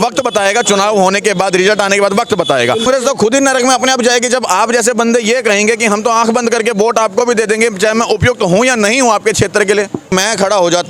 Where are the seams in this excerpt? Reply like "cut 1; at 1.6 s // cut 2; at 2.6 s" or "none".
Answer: cut 1; at 2.9 s // cut 2; at 10.1 s